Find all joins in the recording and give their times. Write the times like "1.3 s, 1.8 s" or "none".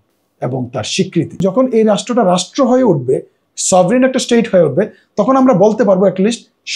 1.4 s